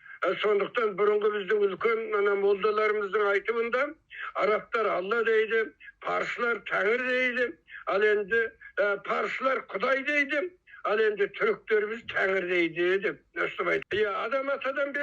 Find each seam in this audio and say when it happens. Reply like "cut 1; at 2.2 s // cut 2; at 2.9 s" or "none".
cut 1; at 13.8 s